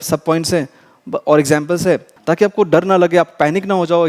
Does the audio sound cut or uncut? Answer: cut